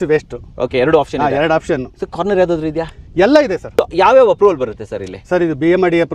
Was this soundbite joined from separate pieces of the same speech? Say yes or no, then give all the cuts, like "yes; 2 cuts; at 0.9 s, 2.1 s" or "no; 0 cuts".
yes; 1 cut; at 3.8 s